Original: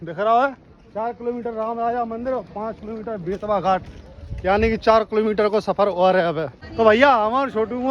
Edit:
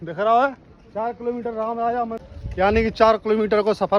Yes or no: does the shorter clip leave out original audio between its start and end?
yes